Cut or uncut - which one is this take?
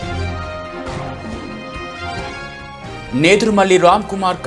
cut